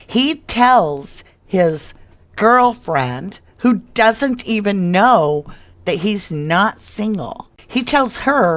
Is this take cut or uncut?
uncut